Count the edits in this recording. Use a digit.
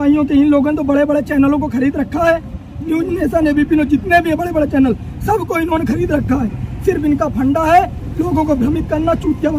0